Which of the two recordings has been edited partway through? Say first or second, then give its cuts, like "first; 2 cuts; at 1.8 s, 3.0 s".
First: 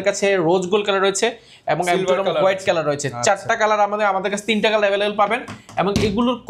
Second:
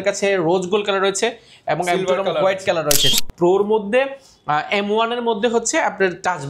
second; 1 cut; at 3.2 s